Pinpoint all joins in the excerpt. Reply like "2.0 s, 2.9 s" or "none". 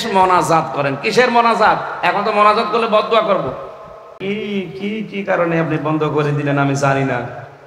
4.2 s